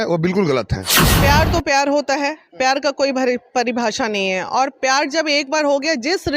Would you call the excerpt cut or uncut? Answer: cut